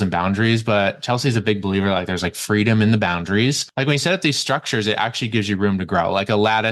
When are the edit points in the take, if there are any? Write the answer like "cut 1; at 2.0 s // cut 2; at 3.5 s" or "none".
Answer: cut 1; at 3.6 s